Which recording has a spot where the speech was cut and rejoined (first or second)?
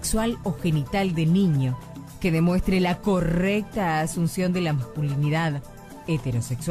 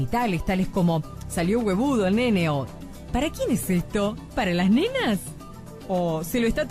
second